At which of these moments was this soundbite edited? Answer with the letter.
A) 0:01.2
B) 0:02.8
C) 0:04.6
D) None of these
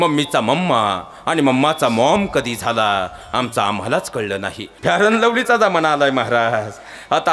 C